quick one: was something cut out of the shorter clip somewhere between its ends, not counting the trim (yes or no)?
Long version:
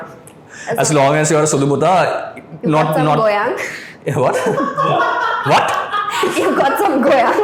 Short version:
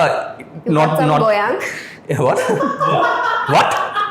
no